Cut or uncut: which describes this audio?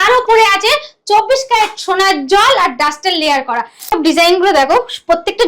cut